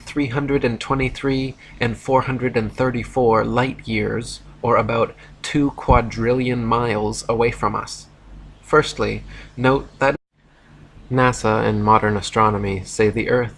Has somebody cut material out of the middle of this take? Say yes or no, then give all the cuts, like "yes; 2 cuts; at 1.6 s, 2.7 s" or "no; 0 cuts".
no; 0 cuts